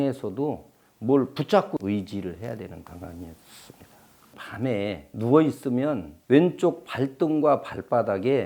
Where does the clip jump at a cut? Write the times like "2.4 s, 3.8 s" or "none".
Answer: 1.8 s, 4.5 s